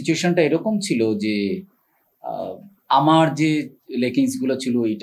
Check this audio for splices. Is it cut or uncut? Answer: uncut